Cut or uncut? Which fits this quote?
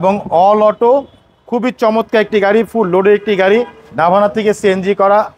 uncut